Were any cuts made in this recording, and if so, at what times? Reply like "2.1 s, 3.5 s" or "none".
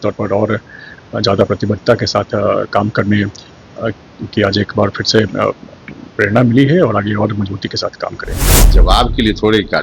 8.7 s